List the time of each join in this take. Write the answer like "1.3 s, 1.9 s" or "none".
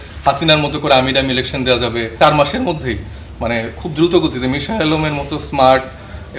2.1 s